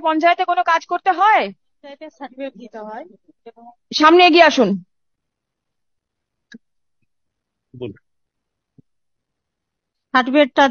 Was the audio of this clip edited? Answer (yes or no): no